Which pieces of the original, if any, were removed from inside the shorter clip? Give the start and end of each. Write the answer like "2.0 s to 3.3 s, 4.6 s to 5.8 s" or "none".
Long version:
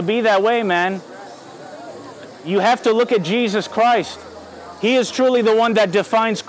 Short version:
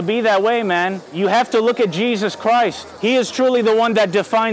1.0 s to 2.4 s, 4.2 s to 4.7 s